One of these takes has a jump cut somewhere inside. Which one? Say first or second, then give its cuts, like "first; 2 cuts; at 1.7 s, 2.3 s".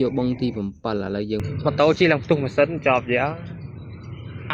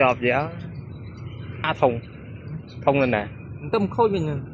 first; 1 cut; at 1.4 s